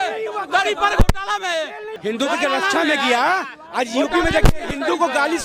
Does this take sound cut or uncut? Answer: cut